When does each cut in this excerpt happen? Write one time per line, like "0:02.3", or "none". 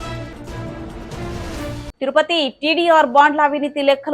0:01.8